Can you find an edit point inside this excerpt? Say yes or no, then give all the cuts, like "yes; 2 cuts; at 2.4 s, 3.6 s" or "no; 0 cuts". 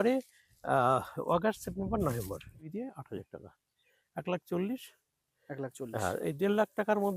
yes; 1 cut; at 2.6 s